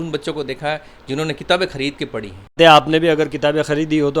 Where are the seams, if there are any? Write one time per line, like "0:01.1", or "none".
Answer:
0:02.5